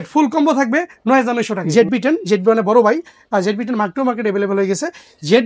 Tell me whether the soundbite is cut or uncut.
cut